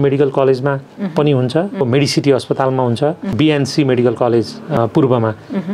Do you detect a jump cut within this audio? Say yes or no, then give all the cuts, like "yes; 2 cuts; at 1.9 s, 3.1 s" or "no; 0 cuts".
yes; 3 cuts; at 1.8 s, 3.2 s, 4.8 s